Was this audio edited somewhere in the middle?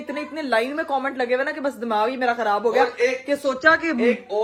no; 0 cuts

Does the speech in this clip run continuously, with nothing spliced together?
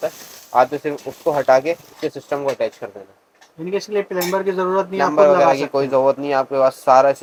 yes; 0 cuts

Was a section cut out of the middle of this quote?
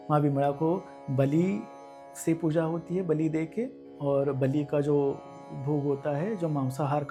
no; 0 cuts

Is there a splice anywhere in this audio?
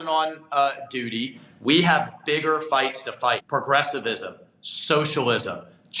yes; 2 cuts; at 1.4 s, 3.4 s

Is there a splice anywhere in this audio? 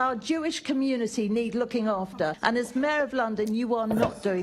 yes; 1 cut; at 2.4 s

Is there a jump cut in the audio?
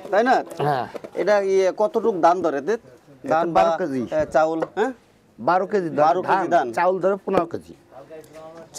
no; 0 cuts

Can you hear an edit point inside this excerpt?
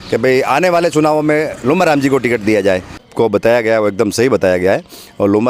yes; 1 cut; at 3.0 s

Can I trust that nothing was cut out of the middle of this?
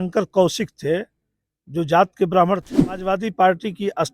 no; 1 cut; at 3.1 s

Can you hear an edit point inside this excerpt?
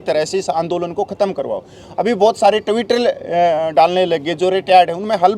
no; 0 cuts

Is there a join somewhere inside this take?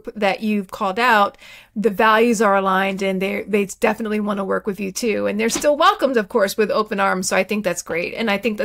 no; 0 cuts

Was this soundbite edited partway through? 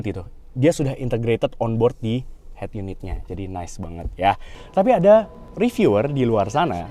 yes; 1 cut; at 4.5 s

